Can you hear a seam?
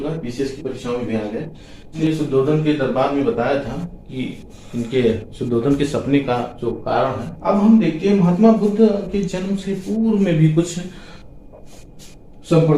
yes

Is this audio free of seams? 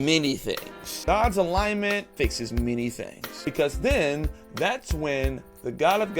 no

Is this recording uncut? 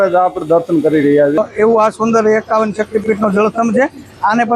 no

